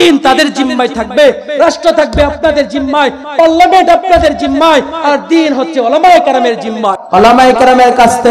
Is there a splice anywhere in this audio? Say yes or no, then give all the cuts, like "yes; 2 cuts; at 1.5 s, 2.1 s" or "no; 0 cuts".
yes; 1 cut; at 7.0 s